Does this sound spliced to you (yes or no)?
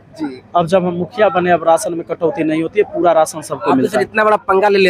no